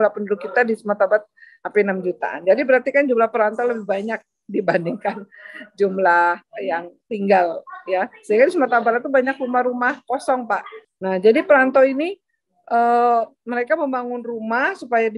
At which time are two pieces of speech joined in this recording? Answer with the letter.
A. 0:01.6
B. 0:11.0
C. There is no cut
B